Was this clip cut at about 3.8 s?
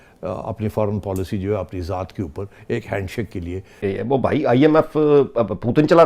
yes; 1 cut; at 3.8 s

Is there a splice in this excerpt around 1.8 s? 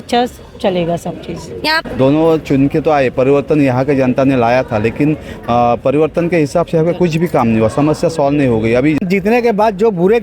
yes; 2 cuts; at 1.8 s, 9.0 s

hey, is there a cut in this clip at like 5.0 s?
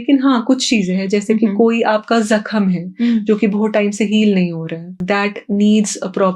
yes; 1 cut; at 5.0 s

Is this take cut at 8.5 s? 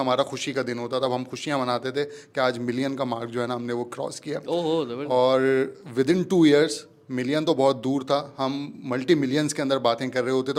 no; 0 cuts

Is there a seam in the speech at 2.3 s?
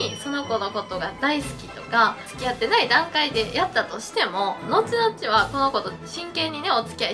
yes; 2 cuts; at 2.3 s, 4.6 s

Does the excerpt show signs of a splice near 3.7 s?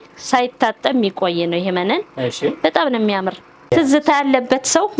yes; 1 cut; at 3.7 s

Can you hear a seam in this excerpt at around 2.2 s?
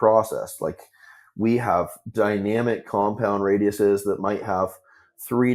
no; 0 cuts

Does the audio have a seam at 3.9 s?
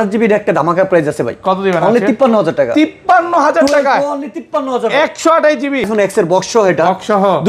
no; 1 cut; at 5.9 s

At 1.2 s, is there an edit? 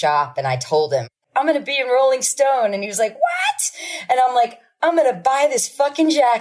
yes; 1 cut; at 1.2 s

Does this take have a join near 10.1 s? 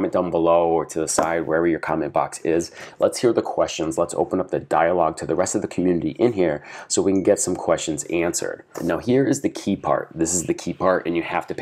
no; 1 cut; at 8.8 s

